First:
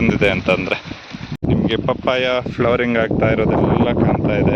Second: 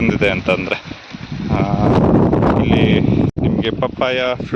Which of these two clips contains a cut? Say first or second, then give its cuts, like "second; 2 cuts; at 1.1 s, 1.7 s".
first; 1 cut; at 1.4 s